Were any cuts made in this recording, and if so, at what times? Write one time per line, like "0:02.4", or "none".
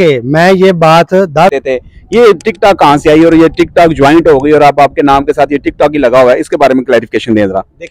0:01.5